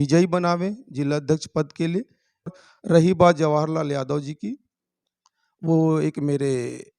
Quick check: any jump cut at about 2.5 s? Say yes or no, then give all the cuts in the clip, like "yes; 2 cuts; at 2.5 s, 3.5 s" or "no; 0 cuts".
yes; 1 cut; at 2.5 s